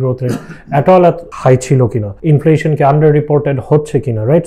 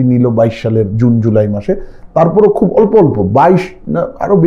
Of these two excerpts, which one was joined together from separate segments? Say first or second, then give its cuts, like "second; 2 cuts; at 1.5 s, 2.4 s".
first; 2 cuts; at 1.3 s, 2.1 s